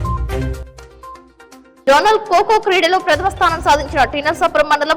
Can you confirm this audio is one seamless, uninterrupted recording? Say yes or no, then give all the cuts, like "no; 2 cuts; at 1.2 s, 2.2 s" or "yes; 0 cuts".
no; 1 cut; at 1.3 s